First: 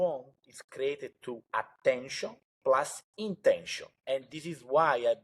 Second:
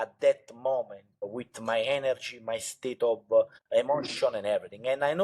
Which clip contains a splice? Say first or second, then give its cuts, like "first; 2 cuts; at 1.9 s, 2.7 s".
second; 2 cuts; at 1.4 s, 3.7 s